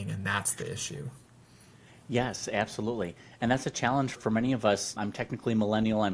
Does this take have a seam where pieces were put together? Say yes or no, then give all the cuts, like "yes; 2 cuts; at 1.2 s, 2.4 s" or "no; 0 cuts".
no; 0 cuts